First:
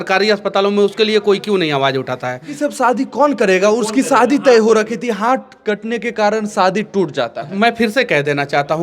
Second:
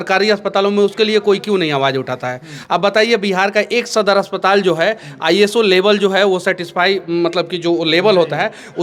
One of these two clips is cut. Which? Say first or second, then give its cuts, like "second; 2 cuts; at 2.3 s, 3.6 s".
first; 1 cut; at 2.5 s